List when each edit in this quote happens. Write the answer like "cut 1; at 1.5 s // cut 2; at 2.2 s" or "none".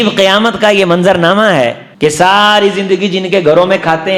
cut 1; at 1.8 s